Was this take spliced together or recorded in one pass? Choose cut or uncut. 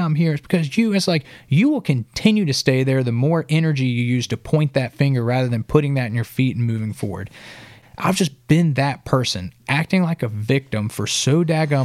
cut